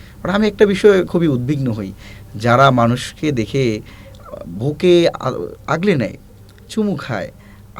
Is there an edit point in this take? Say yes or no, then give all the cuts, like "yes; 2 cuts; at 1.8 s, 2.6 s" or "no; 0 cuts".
no; 0 cuts